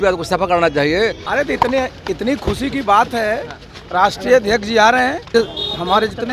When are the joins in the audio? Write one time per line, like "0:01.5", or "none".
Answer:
0:01.2
0:05.2